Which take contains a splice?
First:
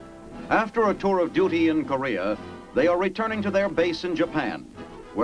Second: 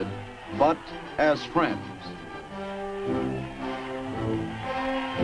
first; 1 cut; at 4.1 s

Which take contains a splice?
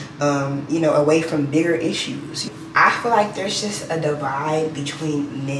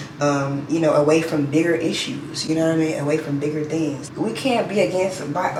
first; 1 cut; at 2.4 s

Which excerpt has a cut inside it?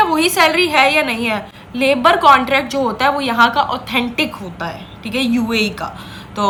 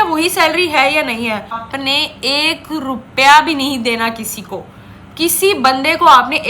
second; 1 cut; at 1.7 s

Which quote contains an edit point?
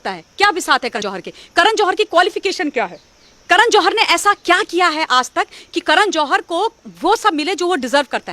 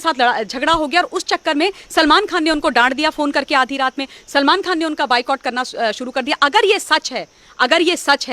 first; 1 cut; at 1.0 s

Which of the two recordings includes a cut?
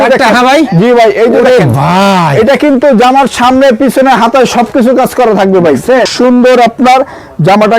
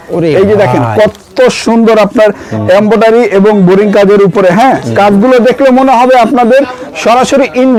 first; 1 cut; at 6.1 s

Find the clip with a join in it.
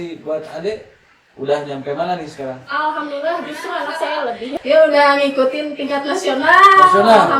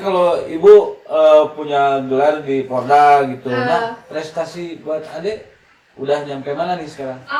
first; 1 cut; at 4.5 s

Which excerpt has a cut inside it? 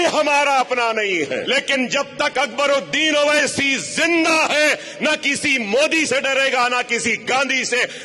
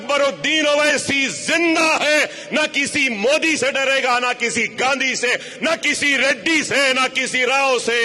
first; 1 cut; at 1.5 s

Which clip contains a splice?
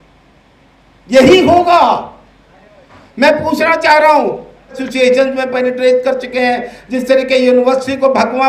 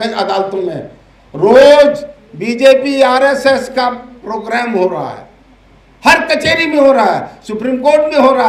first; 1 cut; at 4.8 s

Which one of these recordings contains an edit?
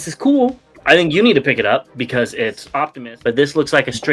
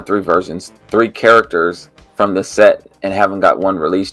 first; 1 cut; at 2.9 s

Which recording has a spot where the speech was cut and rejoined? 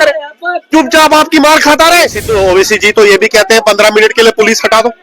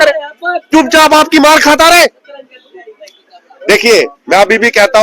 first; 1 cut; at 2.2 s

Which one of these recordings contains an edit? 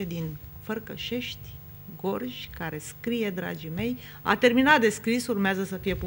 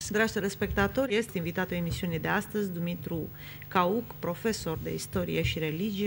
second; 1 cut; at 1.1 s

